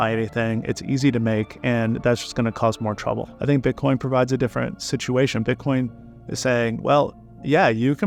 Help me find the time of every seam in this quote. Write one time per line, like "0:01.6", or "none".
none